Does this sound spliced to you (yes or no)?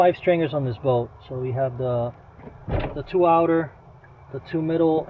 no